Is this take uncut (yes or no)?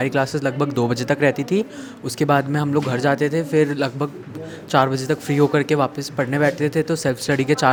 yes